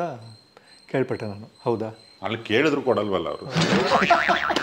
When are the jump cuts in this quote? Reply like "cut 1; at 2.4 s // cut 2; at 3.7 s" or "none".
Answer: cut 1; at 2.0 s

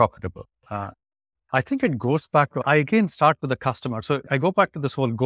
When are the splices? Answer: cut 1; at 2.6 s // cut 2; at 4.3 s

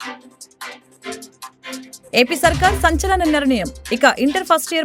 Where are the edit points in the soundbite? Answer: none

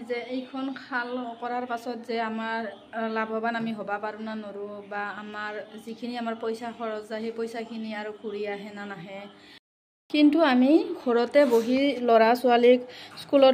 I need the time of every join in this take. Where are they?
cut 1; at 9.6 s

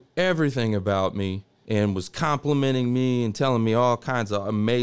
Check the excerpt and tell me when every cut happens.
cut 1; at 1.5 s

